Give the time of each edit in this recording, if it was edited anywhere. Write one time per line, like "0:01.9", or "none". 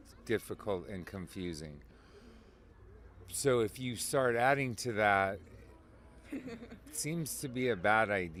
none